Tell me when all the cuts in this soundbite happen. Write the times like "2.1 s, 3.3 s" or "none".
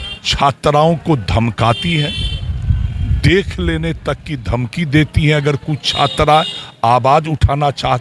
none